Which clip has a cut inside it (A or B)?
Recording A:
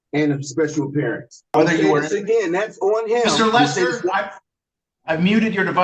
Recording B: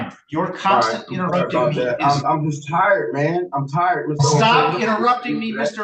A